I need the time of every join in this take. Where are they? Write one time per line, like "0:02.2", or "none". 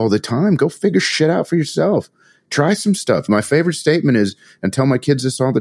0:03.3